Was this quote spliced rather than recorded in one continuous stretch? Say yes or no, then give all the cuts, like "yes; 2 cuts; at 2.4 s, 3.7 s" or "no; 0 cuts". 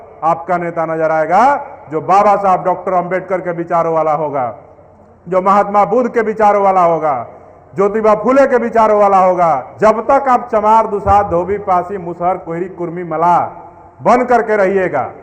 yes; 2 cuts; at 0.9 s, 9.7 s